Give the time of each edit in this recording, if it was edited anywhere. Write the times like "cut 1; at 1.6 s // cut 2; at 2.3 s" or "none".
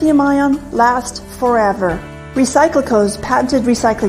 cut 1; at 1.0 s